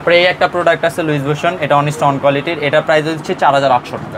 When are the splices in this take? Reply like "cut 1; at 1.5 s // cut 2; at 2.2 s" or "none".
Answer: none